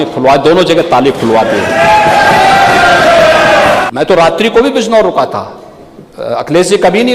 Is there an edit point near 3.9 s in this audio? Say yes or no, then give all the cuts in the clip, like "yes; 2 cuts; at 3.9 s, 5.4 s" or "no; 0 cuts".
yes; 1 cut; at 3.9 s